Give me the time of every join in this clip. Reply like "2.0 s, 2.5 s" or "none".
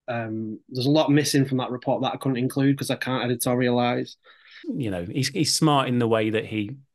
4.5 s